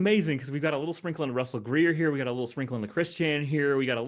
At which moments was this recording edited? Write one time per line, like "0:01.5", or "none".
none